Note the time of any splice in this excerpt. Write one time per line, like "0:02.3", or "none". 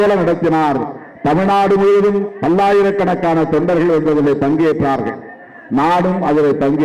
none